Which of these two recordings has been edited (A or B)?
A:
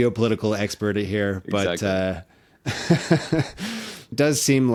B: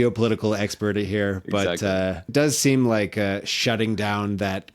B